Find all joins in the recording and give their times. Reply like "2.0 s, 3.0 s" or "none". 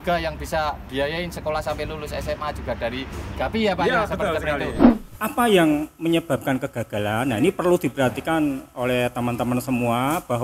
4.9 s